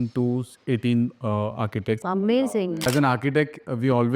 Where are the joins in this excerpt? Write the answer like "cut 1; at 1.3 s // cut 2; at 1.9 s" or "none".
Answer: cut 1; at 2.9 s